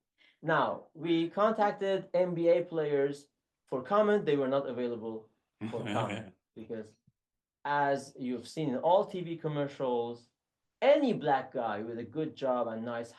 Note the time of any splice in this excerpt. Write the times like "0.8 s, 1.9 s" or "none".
none